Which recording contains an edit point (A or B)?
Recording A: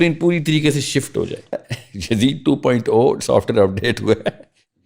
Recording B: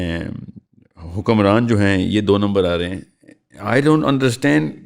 A